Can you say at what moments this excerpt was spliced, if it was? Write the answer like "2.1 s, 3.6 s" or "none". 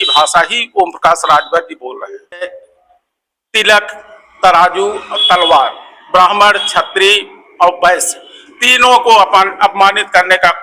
2.4 s